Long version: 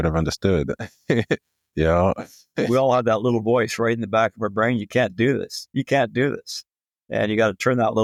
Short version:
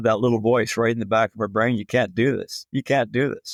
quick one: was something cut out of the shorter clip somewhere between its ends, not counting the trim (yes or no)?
no